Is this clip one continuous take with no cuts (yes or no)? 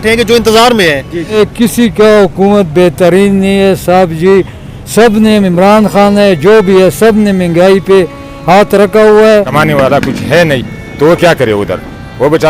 no